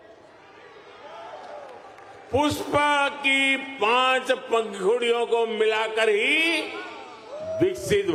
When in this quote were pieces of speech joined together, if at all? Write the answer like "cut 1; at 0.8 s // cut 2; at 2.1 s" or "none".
none